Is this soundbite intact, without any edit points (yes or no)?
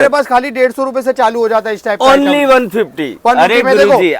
yes